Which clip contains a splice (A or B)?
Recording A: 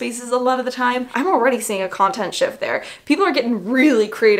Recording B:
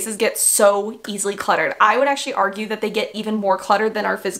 A